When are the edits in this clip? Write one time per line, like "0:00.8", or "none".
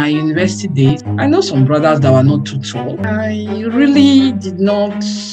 0:00.9
0:03.0